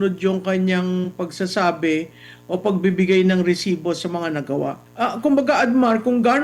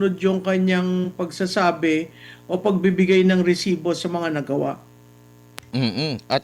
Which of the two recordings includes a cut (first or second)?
first